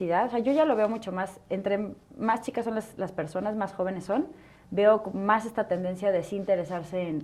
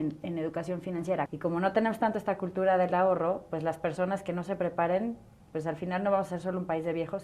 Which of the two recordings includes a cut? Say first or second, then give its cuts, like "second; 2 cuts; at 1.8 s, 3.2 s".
second; 1 cut; at 1.3 s